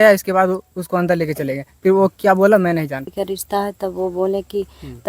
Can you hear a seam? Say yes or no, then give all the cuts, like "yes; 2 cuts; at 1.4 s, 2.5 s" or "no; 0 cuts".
yes; 1 cut; at 3.1 s